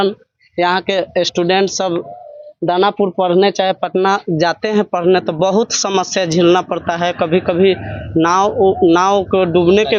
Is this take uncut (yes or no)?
yes